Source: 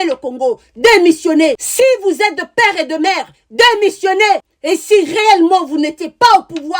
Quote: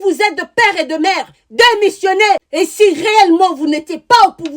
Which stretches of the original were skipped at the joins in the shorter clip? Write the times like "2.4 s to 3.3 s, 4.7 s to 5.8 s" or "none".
4.5 s to 4.6 s